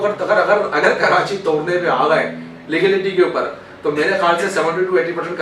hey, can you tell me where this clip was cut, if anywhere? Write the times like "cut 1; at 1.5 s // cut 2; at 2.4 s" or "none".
none

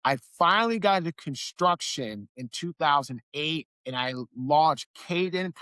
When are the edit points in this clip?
none

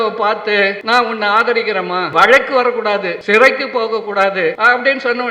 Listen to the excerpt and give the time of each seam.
cut 1; at 0.8 s // cut 2; at 2.1 s // cut 3; at 3.1 s // cut 4; at 4.6 s

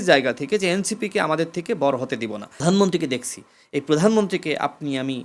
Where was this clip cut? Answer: cut 1; at 2.6 s

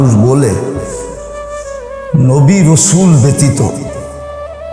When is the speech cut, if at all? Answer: none

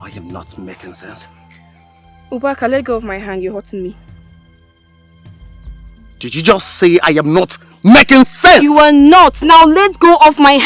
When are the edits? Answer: cut 1; at 4.0 s // cut 2; at 6.2 s

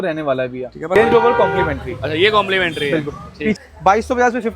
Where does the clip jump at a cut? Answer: cut 1; at 1.0 s // cut 2; at 3.6 s

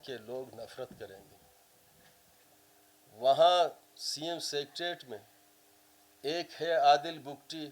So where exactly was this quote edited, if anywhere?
cut 1; at 2.4 s

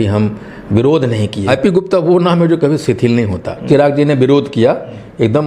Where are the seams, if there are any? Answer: cut 1; at 1.4 s // cut 2; at 3.7 s

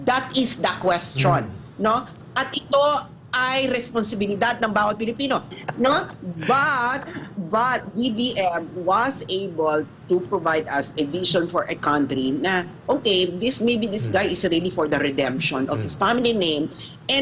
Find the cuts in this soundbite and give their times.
cut 1; at 5.5 s

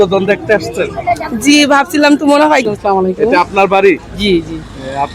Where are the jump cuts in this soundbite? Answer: cut 1; at 2.6 s

